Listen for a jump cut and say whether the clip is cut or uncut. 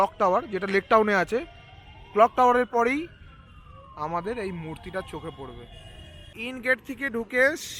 cut